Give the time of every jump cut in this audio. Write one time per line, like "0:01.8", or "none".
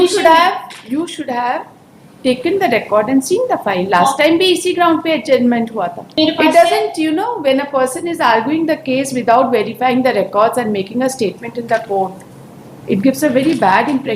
0:06.1